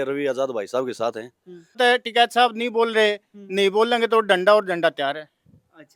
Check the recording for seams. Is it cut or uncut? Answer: cut